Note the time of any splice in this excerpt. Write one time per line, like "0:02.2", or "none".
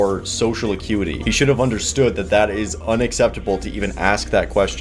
none